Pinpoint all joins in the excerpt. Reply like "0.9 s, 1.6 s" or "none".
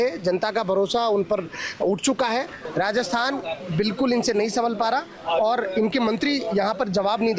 2.6 s

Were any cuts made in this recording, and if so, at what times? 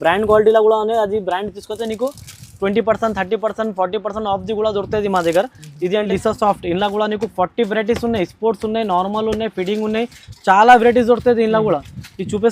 6.0 s

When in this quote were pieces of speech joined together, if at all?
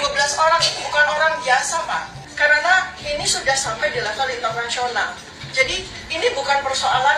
2.3 s

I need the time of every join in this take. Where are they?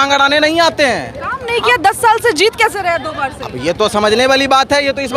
none

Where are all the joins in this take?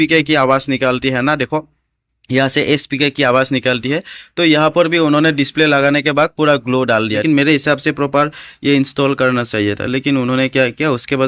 7.2 s

